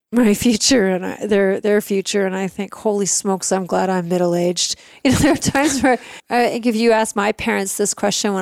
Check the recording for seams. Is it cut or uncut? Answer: uncut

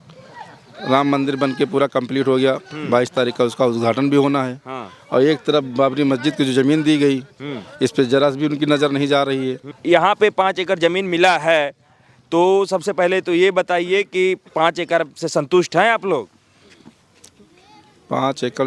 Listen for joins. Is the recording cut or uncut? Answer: cut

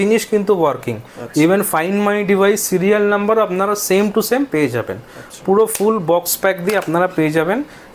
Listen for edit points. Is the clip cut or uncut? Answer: uncut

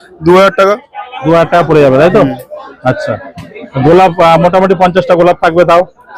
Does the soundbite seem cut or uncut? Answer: uncut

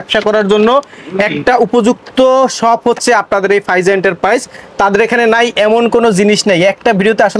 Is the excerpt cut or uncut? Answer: uncut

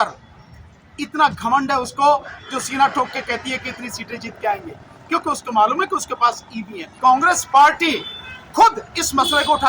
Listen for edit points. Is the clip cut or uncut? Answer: cut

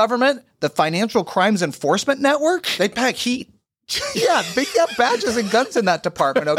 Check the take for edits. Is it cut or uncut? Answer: uncut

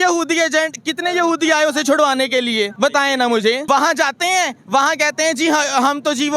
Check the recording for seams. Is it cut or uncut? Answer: cut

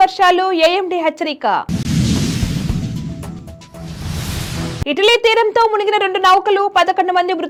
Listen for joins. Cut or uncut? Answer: uncut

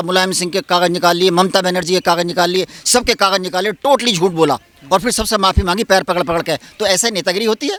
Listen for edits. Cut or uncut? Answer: uncut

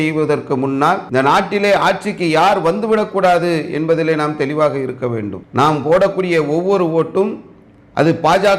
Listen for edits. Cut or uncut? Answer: cut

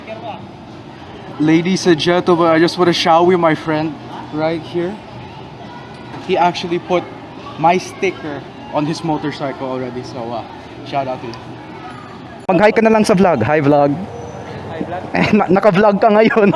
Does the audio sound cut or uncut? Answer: uncut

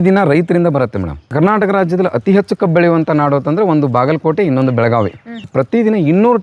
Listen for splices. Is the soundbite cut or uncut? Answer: cut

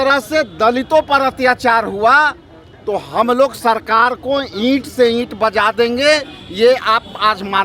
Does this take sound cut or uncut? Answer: uncut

